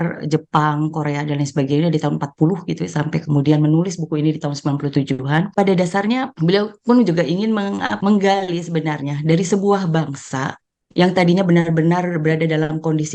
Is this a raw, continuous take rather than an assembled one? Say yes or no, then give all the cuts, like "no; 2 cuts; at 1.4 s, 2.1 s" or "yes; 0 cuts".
no; 3 cuts; at 5.5 s, 6.3 s, 7.9 s